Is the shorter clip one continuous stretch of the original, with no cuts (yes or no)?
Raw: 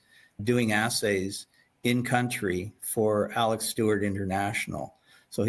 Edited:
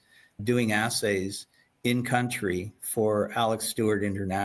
yes